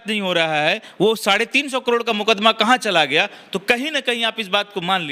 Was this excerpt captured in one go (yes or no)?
yes